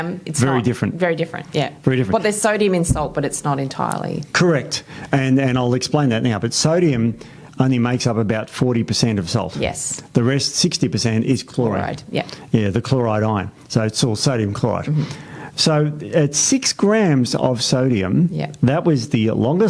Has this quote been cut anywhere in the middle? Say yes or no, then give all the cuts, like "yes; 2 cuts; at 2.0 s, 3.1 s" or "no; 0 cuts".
no; 0 cuts